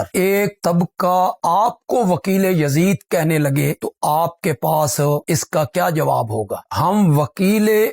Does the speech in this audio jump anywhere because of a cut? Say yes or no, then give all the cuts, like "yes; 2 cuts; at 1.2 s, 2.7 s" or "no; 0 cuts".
yes; 1 cut; at 6.6 s